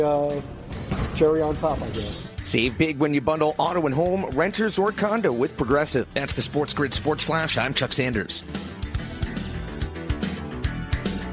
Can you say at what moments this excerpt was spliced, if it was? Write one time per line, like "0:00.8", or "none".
0:02.4